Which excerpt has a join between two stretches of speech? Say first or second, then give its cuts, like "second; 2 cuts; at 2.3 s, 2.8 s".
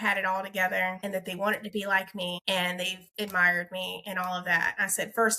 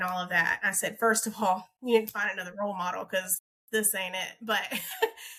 first; 2 cuts; at 1.0 s, 2.4 s